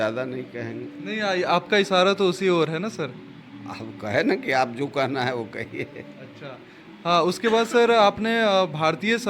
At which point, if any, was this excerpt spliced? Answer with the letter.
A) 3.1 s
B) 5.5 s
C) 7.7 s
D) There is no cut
D